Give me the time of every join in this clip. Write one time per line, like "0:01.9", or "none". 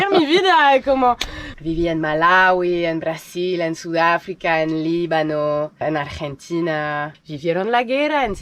0:01.4
0:07.1